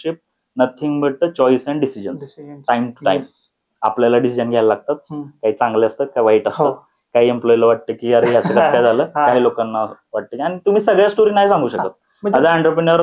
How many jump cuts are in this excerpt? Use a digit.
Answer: 0